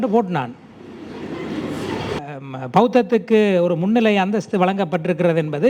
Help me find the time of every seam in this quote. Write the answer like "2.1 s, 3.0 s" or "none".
2.2 s